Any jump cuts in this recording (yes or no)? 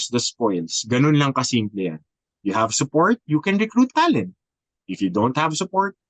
no